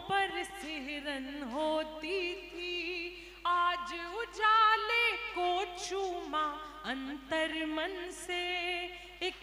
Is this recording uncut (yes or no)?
yes